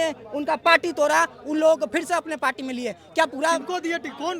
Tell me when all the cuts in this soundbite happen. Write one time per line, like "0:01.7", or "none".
none